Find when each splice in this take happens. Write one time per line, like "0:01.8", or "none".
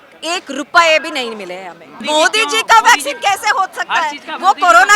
0:02.0